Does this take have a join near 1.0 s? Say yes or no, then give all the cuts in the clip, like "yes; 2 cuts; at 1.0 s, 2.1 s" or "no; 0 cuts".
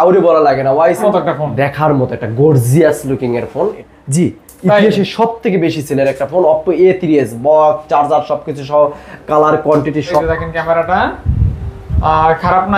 yes; 3 cuts; at 1.0 s, 3.8 s, 10.2 s